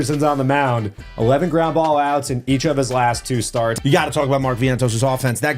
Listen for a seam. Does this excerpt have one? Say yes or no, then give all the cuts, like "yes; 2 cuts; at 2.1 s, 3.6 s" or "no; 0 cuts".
yes; 1 cut; at 3.7 s